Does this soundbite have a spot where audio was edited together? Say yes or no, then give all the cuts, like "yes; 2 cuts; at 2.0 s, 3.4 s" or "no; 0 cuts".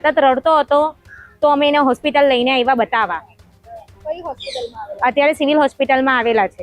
no; 0 cuts